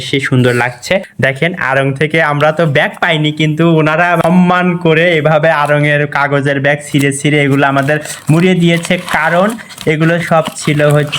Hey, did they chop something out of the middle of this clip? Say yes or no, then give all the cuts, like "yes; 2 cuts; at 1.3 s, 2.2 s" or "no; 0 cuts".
yes; 2 cuts; at 1.1 s, 4.2 s